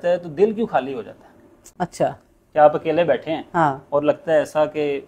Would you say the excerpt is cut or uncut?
uncut